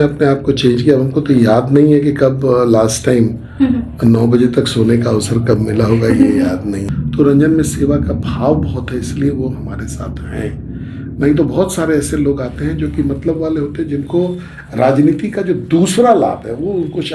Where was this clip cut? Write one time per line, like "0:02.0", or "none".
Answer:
0:06.9